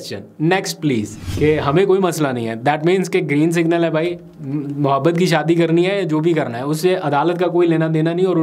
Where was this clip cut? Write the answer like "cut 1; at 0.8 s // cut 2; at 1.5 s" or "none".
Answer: cut 1; at 1.2 s